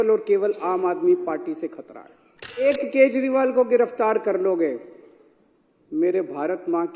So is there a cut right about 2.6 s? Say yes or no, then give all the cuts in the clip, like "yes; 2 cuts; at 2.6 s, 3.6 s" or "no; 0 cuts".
yes; 1 cut; at 2.6 s